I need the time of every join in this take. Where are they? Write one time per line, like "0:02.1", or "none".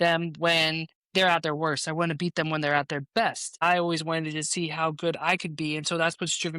0:03.6